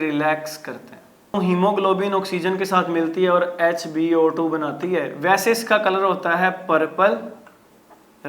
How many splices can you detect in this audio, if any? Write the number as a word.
one